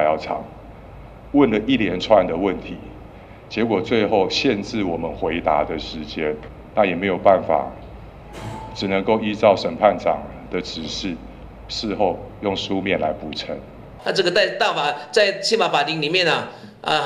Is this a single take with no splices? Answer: no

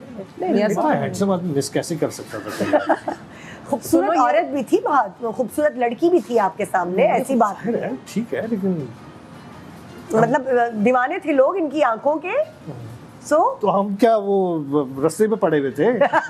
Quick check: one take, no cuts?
yes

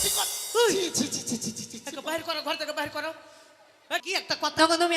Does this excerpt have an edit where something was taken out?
yes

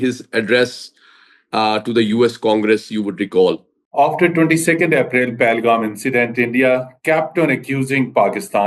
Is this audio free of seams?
no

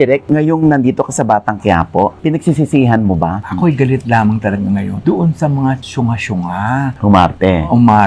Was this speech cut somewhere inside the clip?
yes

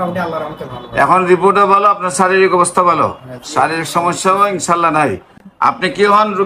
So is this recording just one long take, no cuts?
yes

